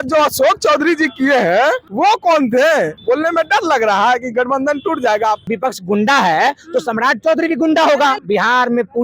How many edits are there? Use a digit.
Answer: 4